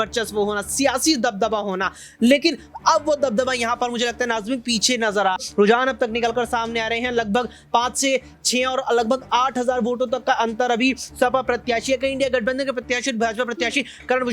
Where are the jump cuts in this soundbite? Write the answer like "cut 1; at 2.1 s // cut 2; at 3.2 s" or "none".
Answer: cut 1; at 5.4 s